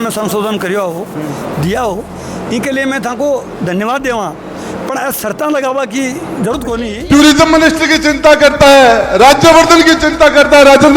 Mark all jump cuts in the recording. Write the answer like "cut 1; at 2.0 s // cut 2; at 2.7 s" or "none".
cut 1; at 6.9 s